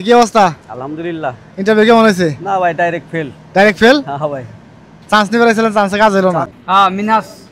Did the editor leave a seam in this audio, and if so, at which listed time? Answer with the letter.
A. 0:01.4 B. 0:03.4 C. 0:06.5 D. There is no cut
C